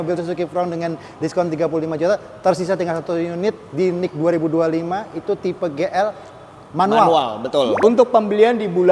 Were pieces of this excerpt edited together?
yes; 1 cut; at 7.8 s

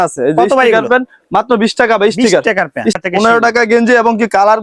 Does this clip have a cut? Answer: yes; 1 cut; at 3.0 s

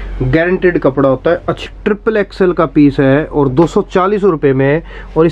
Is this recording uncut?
no; 1 cut; at 1.6 s

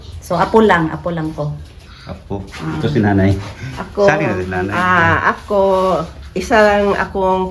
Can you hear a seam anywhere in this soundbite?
no; 0 cuts

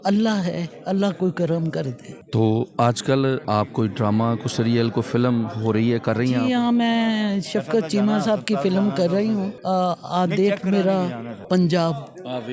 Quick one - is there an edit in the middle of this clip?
yes; 3 cuts; at 3.4 s, 9.5 s, 11.3 s

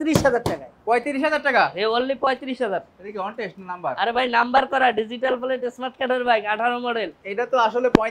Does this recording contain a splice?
no; 0 cuts

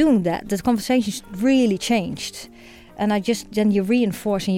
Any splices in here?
no; 0 cuts

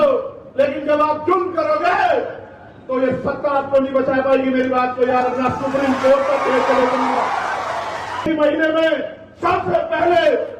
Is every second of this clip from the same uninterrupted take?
no; 1 cut; at 8.2 s

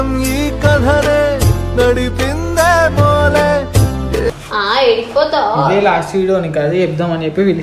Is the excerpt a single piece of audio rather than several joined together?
no; 1 cut; at 4.3 s

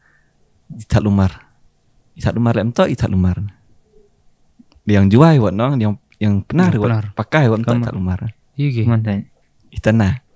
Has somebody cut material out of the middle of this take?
no; 0 cuts

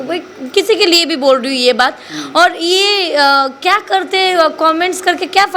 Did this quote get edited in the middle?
no; 0 cuts

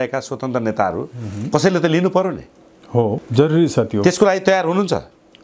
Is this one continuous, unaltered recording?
no; 1 cut; at 3.2 s

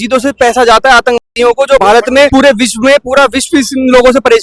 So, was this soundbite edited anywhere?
yes; 1 cut; at 2.0 s

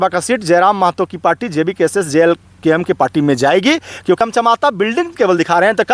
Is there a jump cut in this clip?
yes; 1 cut; at 4.2 s

